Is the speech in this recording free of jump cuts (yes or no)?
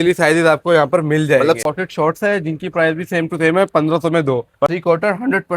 no